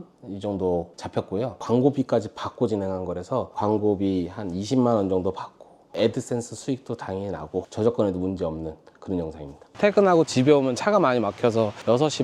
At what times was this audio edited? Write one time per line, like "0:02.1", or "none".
0:03.5
0:07.7
0:09.8